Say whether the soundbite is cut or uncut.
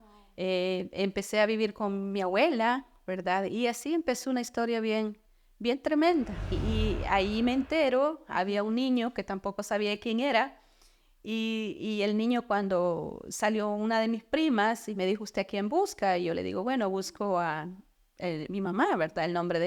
cut